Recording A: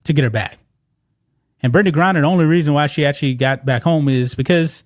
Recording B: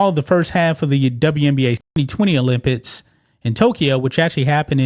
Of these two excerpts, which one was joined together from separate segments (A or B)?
B